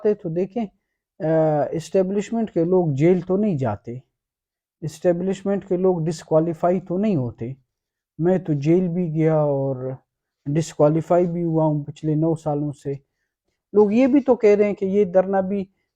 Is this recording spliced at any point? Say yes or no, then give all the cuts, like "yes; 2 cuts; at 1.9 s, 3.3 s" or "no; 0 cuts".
yes; 1 cut; at 13.4 s